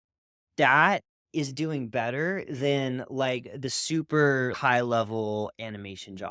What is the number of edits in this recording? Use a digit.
1